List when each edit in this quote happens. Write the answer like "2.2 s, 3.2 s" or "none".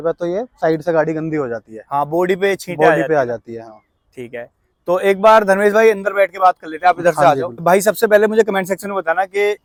none